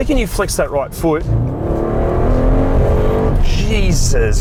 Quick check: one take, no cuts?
yes; 0 cuts

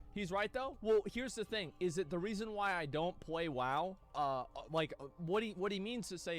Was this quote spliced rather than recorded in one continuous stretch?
no; 0 cuts

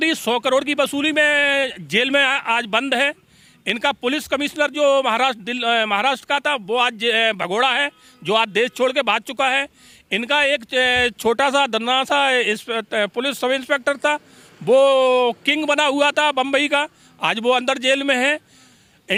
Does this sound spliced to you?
no; 0 cuts

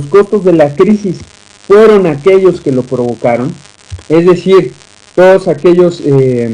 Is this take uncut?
no; 1 cut; at 5.1 s

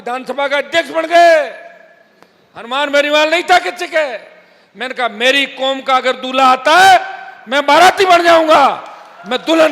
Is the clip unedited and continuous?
yes; 0 cuts

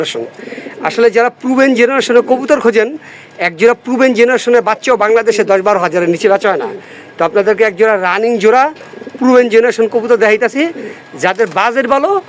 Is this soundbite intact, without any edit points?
yes; 0 cuts

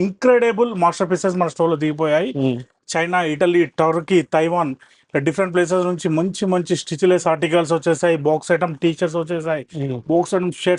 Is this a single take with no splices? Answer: yes; 0 cuts

